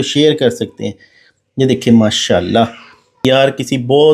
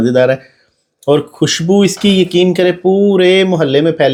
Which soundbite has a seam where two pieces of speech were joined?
first; 1 cut; at 3.2 s

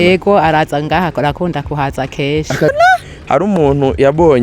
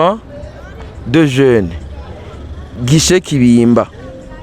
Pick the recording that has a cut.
first; 1 cut; at 2.7 s

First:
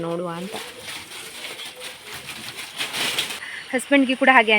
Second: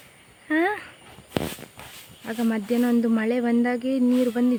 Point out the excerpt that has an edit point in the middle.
first; 1 cut; at 3.5 s

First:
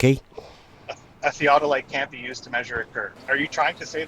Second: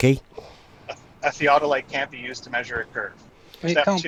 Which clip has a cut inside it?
first; 1 cut; at 3.2 s

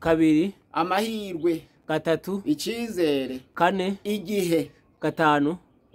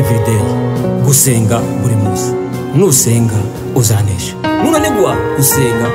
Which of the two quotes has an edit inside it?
first; 1 cut; at 4.8 s

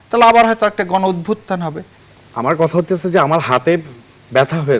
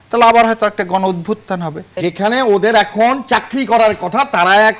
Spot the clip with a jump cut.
second; 1 cut; at 1.8 s

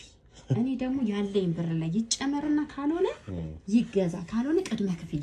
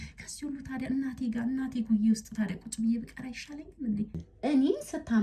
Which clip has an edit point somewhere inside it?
second; 1 cut; at 4.2 s

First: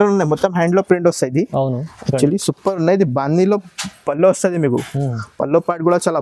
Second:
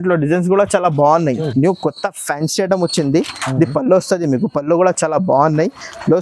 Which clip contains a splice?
second; 1 cut; at 1.5 s

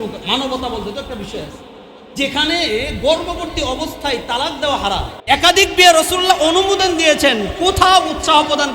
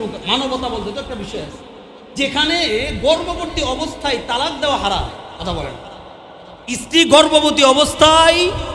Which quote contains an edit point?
first; 1 cut; at 5.1 s

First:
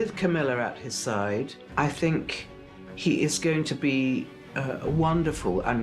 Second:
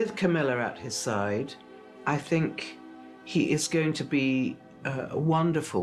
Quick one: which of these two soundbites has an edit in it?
first; 1 cut; at 1.6 s

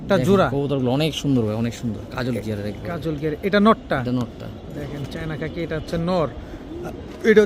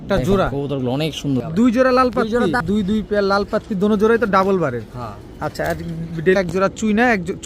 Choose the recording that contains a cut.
second; 3 cuts; at 1.5 s, 2.6 s, 6.4 s

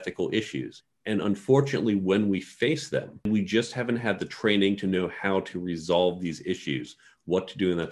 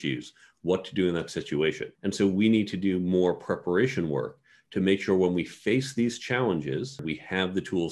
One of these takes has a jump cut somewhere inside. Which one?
second; 1 cut; at 6.9 s

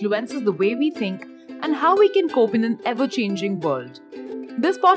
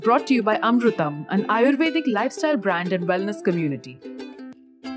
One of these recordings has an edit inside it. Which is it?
second; 1 cut; at 3.8 s

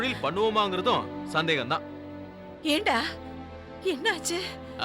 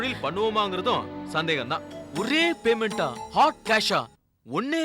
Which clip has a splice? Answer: second; 1 cut; at 2.0 s

